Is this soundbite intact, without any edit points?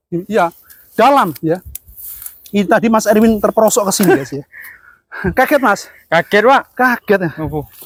yes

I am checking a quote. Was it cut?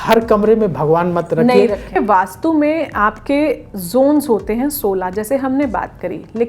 yes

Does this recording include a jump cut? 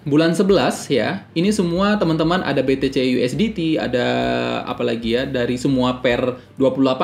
no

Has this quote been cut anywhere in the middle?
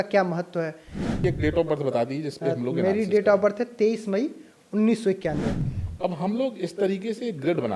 yes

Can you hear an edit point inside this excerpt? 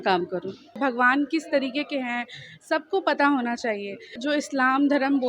yes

